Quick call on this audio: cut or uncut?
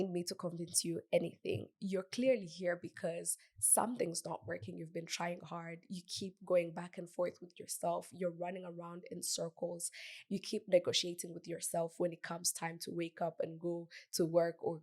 cut